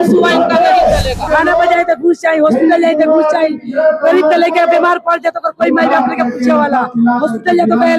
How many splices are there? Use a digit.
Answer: 1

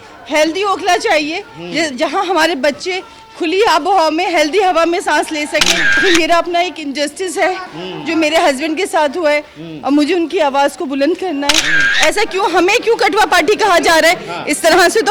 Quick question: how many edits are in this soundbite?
2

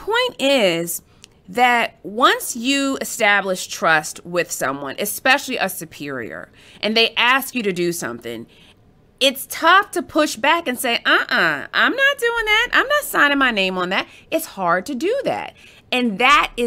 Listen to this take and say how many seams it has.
0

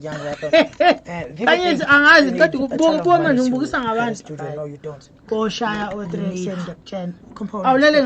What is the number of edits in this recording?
1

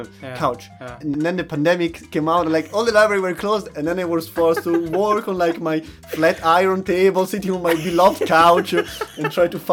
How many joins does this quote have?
2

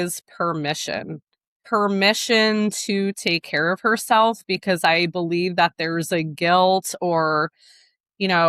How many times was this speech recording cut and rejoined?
1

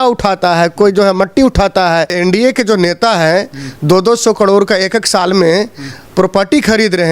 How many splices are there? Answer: 1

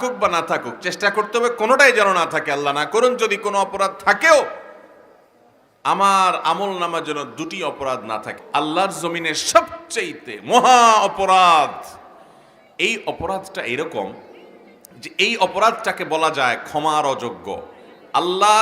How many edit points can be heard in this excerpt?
1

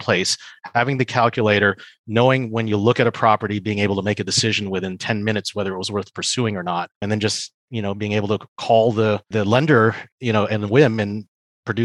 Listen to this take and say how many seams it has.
2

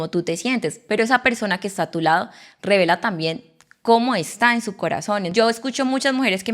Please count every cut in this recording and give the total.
1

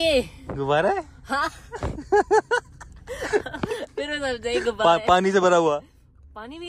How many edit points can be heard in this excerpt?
0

